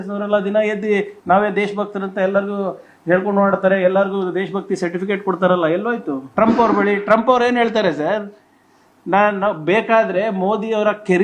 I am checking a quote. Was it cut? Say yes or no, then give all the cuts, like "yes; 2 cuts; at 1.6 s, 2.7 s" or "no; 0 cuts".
yes; 1 cut; at 6.2 s